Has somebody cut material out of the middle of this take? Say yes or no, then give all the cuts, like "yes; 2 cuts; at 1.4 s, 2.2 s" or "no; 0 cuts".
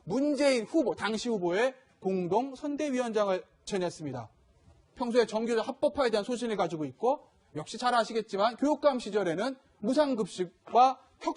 no; 0 cuts